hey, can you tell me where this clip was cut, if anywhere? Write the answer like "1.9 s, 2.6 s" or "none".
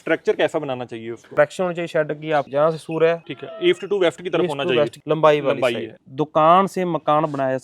1.3 s, 3.3 s, 5.0 s, 6.0 s